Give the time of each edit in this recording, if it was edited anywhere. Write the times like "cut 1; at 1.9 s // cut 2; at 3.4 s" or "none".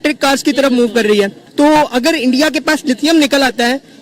cut 1; at 1.4 s